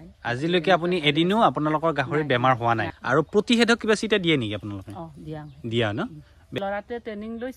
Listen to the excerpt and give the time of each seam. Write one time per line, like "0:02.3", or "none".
0:02.9
0:06.6